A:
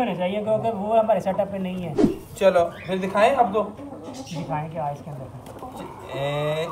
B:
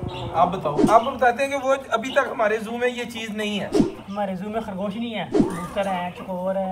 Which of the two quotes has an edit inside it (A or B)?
B